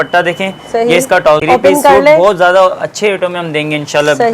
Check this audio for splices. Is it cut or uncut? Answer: cut